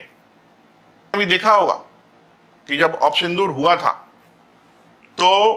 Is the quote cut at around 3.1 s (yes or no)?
no